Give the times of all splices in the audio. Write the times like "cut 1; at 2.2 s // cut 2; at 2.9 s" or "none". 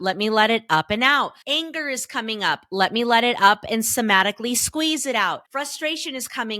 cut 1; at 1.4 s // cut 2; at 5.4 s